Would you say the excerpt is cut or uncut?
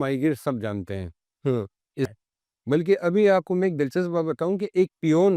cut